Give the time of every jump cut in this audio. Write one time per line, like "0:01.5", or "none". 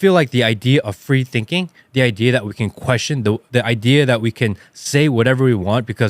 0:03.4